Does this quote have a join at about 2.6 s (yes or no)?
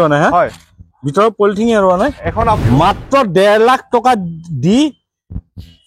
yes